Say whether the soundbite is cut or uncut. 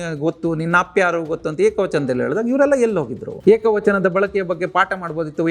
cut